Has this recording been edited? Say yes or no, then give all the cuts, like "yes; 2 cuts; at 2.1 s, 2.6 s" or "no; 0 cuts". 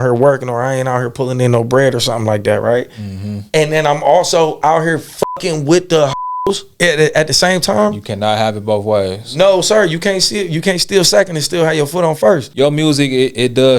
yes; 2 cuts; at 6.1 s, 12.5 s